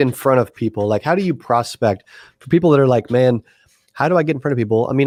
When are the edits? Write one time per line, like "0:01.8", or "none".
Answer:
none